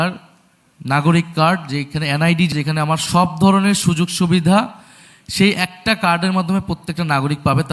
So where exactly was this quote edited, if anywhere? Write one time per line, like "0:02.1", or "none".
0:02.5